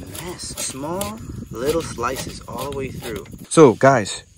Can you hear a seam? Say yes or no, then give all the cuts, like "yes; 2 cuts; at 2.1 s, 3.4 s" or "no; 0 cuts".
yes; 1 cut; at 3.4 s